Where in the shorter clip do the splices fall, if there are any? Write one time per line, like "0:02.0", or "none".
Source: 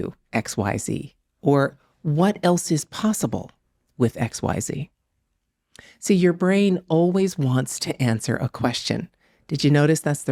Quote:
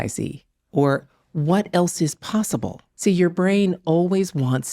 0:02.8